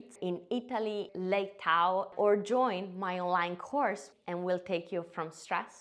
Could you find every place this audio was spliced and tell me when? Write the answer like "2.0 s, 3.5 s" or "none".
1.1 s, 2.1 s, 4.1 s